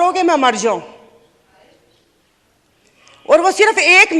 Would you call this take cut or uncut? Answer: uncut